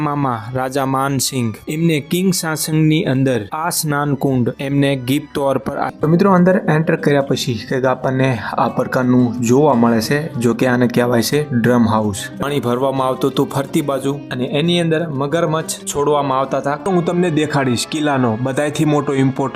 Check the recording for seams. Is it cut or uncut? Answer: cut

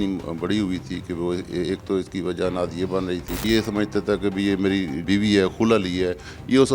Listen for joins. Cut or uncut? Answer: cut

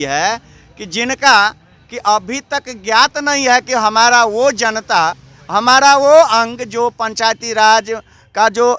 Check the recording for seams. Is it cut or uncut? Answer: uncut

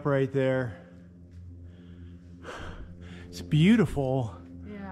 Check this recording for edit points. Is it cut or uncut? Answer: uncut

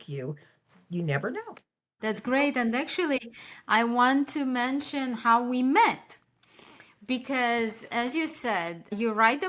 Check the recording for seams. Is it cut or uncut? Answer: cut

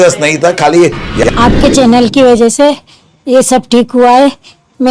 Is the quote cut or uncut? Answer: cut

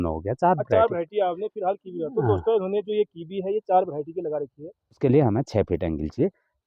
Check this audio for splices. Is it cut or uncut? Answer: cut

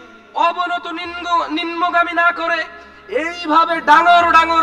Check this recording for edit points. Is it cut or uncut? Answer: uncut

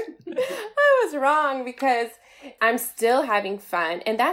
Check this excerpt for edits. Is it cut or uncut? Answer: cut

